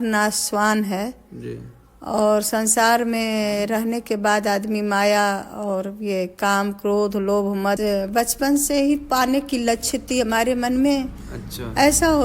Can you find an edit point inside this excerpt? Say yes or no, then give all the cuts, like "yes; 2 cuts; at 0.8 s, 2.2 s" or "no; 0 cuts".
yes; 1 cut; at 7.8 s